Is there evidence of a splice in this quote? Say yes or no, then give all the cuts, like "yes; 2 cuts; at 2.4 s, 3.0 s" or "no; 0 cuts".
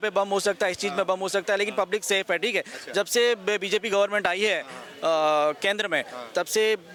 no; 0 cuts